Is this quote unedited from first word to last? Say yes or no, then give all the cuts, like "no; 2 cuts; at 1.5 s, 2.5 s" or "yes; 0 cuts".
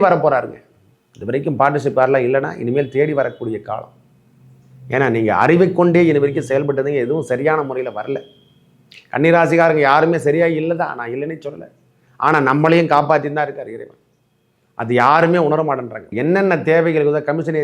no; 1 cut; at 16.0 s